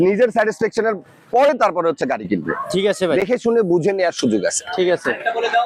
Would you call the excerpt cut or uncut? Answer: uncut